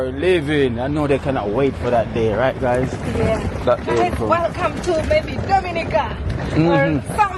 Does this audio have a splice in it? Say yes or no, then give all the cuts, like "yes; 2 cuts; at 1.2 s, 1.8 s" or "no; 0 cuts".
no; 0 cuts